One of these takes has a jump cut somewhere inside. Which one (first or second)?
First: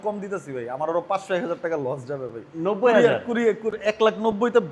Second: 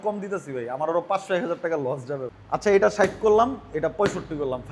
second